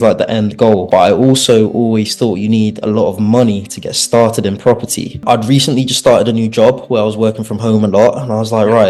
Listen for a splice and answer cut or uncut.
uncut